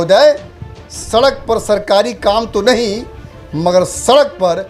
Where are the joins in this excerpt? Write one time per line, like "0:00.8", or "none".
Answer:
none